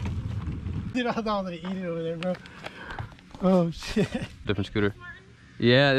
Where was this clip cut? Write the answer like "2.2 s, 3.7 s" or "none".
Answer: 0.9 s, 4.4 s